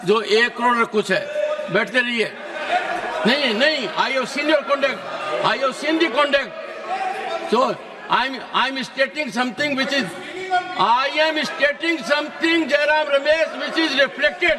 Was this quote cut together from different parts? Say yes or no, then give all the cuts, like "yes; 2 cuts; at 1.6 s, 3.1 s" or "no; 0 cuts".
no; 0 cuts